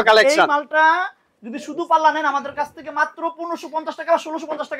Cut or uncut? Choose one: uncut